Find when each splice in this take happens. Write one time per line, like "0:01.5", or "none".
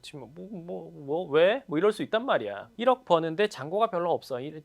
0:02.6